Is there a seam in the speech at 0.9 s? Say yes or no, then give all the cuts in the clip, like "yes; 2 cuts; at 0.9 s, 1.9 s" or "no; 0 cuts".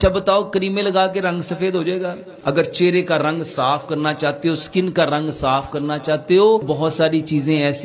no; 2 cuts; at 2.3 s, 6.6 s